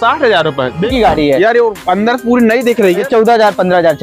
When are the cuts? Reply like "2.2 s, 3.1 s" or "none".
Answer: 0.9 s, 3.0 s